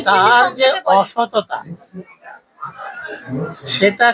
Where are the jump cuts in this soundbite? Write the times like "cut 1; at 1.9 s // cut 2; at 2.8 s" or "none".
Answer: none